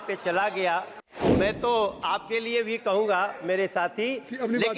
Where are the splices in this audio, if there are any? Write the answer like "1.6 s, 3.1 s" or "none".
1.3 s